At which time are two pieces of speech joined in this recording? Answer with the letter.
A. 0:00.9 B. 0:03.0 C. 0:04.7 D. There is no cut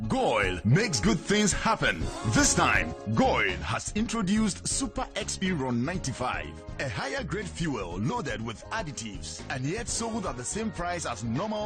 A